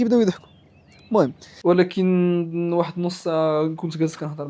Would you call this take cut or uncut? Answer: cut